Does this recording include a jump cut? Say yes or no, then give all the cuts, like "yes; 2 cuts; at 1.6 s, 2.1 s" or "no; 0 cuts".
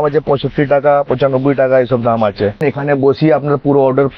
yes; 1 cut; at 2.6 s